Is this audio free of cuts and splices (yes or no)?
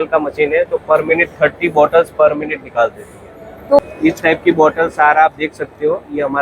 no